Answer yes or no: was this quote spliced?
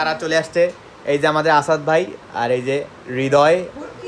no